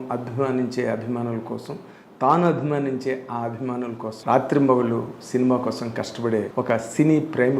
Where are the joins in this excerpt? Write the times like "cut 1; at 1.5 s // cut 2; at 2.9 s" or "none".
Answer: cut 1; at 4.1 s // cut 2; at 6.5 s